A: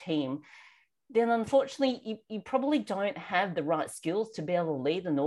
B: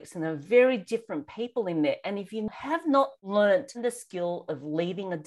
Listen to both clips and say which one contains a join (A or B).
B